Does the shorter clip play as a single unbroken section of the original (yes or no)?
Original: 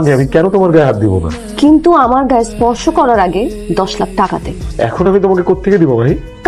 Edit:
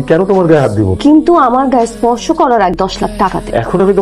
no